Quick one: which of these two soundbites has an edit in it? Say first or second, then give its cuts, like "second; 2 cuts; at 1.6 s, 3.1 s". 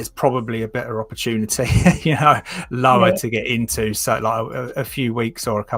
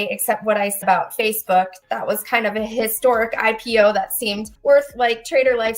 second; 1 cut; at 4.5 s